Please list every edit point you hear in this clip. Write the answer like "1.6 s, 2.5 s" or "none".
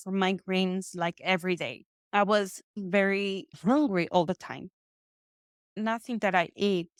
none

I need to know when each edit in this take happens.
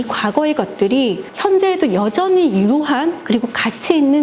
1.3 s

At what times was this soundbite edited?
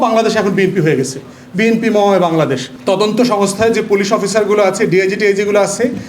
2.7 s

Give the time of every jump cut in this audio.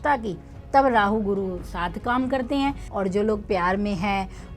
2.8 s

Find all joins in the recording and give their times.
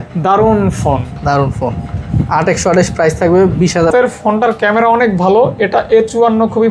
3.9 s

